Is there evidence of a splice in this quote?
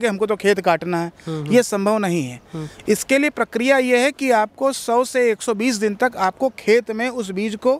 no; 0 cuts

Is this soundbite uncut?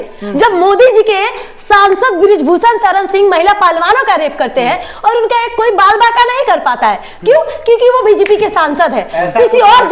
yes; 0 cuts

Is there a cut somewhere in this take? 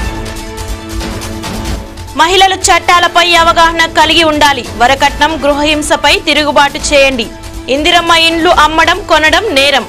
no; 0 cuts

